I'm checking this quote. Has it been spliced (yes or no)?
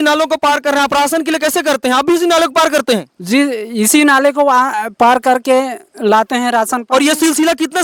no